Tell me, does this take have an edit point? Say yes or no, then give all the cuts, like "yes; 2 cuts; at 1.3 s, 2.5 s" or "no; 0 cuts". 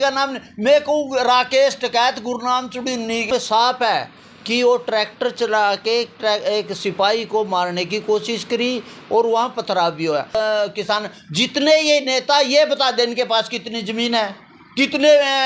yes; 2 cuts; at 3.3 s, 10.3 s